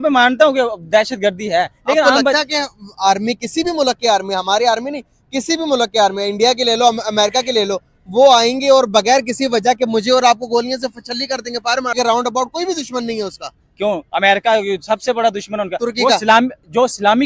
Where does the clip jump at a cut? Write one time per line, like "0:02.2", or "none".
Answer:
0:11.9